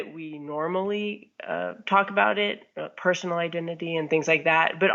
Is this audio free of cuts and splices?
yes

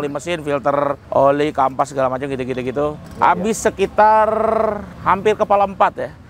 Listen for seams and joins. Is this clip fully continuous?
no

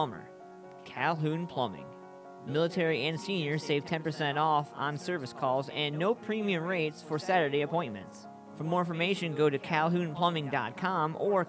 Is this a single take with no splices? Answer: yes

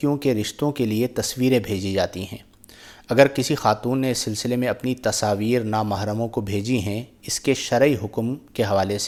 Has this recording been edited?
no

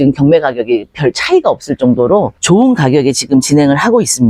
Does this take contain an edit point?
no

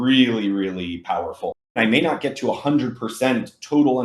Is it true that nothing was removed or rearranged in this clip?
no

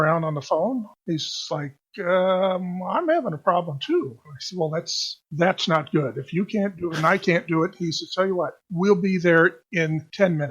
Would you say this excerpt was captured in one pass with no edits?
no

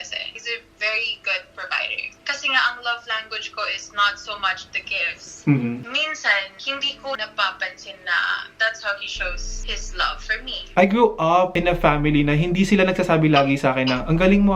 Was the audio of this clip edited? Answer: yes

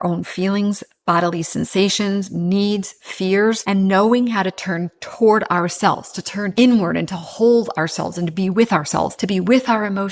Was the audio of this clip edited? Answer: yes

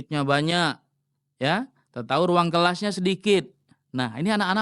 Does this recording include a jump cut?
no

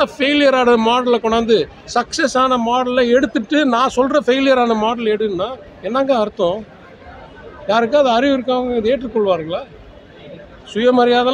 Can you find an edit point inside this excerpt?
no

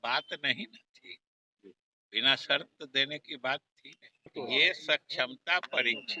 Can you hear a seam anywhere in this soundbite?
yes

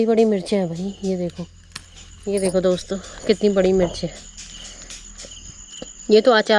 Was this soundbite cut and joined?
no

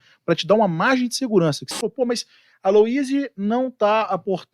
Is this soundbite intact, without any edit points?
no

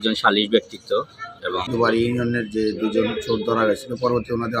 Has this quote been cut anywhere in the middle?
yes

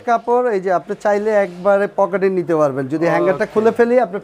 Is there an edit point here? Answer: no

